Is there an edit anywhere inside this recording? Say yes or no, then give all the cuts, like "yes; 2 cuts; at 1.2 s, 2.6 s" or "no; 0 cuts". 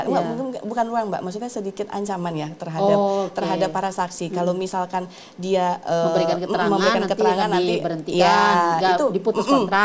no; 0 cuts